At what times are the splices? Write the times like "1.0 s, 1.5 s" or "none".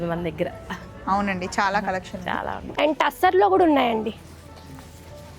2.6 s